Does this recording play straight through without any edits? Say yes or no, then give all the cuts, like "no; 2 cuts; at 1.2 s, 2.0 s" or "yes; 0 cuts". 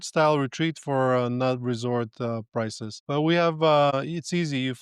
no; 2 cuts; at 2.9 s, 3.9 s